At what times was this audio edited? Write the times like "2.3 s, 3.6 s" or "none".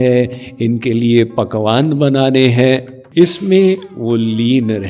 3.0 s